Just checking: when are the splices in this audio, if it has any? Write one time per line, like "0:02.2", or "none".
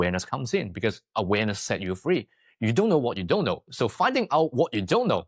none